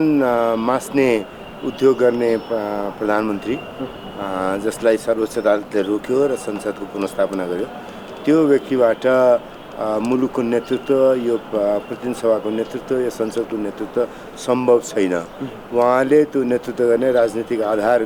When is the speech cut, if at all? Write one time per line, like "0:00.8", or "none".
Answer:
none